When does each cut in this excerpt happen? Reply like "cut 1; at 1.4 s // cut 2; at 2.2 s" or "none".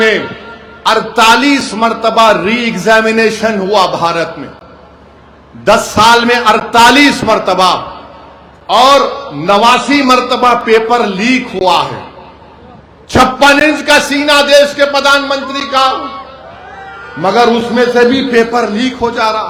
none